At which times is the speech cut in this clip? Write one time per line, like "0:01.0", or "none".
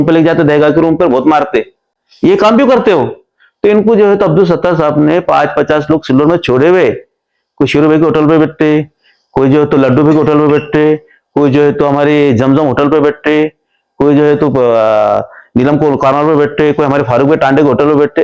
none

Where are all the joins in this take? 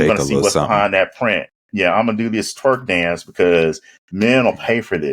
none

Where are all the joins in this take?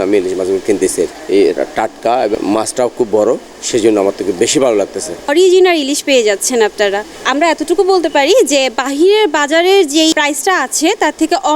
0:01.2
0:02.3
0:05.3
0:10.1

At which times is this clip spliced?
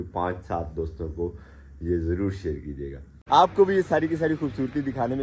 0:03.2

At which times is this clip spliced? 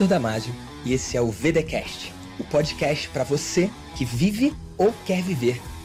none

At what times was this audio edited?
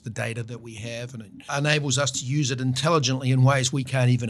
0:01.5
0:02.8

